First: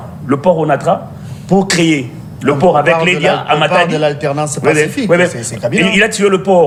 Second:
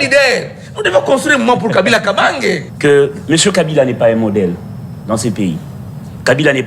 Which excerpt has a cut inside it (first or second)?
second